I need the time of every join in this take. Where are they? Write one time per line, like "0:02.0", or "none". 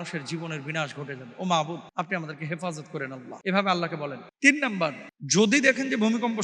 0:01.9
0:03.3
0:04.2
0:05.1